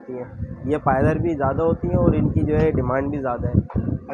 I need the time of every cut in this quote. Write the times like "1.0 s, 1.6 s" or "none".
none